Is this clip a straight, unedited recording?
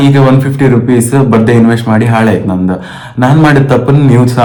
yes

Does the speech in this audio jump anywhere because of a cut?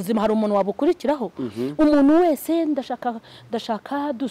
no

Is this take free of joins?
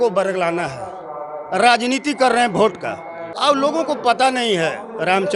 no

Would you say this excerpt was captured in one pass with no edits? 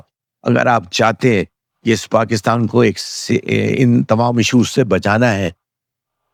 yes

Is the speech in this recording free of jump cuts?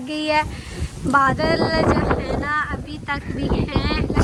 yes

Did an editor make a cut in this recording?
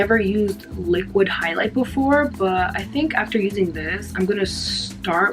no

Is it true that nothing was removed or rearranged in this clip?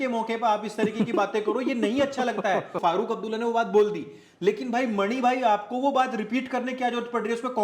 no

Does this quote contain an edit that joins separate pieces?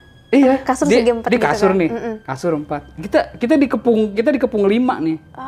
no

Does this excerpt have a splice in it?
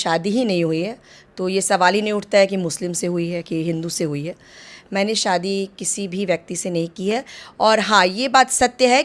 no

